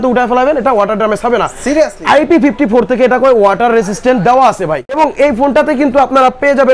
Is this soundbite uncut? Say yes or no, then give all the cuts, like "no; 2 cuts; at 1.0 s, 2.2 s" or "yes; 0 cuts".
yes; 0 cuts